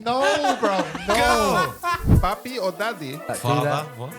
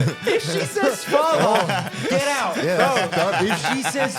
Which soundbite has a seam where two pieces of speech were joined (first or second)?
first